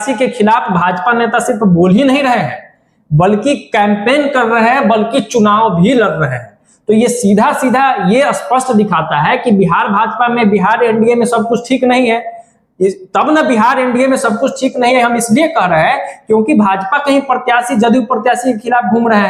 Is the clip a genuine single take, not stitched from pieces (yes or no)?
yes